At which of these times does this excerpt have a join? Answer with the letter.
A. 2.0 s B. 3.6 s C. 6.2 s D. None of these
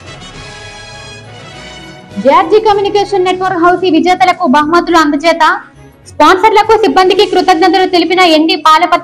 D